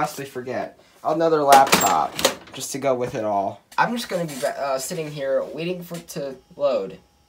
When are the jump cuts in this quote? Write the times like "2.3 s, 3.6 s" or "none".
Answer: 3.6 s